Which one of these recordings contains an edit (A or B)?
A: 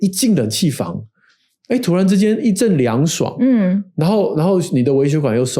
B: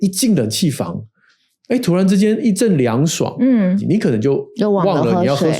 B